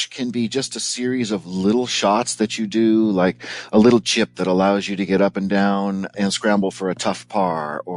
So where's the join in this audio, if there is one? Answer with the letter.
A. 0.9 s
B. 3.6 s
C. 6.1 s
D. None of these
C